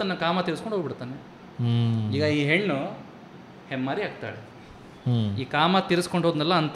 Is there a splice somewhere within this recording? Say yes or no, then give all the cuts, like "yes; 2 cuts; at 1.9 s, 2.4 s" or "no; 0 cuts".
no; 0 cuts